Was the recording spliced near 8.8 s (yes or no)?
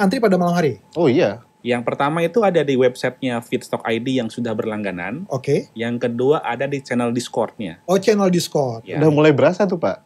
yes